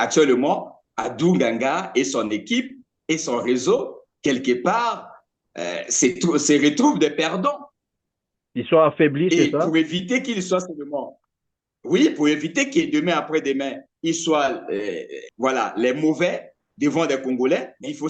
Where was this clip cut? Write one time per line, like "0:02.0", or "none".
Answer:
none

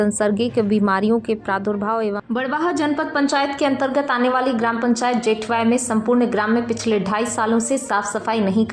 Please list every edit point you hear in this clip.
0:02.2

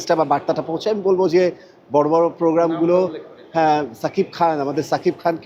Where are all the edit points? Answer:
none

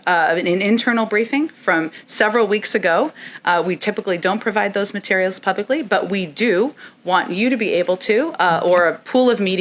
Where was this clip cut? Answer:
none

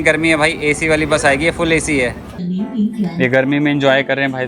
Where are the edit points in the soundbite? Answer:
0:02.4

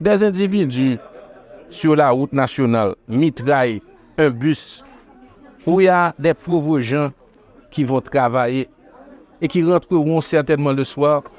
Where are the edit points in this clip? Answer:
none

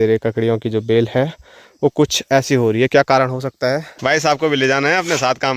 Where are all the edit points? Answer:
0:03.9

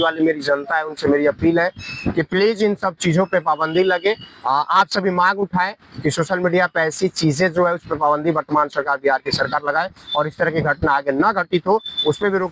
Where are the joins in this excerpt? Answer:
none

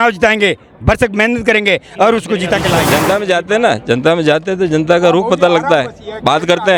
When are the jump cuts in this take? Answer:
0:02.9

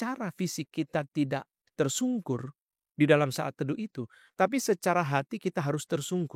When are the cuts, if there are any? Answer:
none

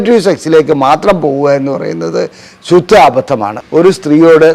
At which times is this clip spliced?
0:03.6

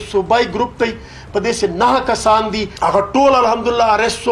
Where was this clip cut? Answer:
0:02.7

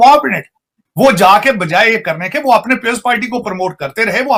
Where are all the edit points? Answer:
none

